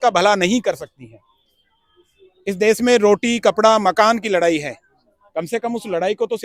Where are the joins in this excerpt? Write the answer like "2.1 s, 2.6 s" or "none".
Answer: none